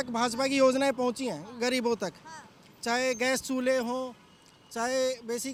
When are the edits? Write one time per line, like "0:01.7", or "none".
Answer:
none

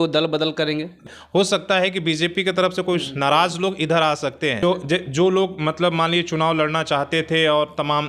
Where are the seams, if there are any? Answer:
0:01.0
0:04.6

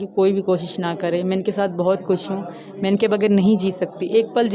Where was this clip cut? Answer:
none

